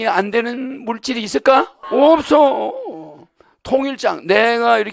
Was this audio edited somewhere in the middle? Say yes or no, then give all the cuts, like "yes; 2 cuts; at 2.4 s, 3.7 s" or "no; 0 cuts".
yes; 1 cut; at 1.8 s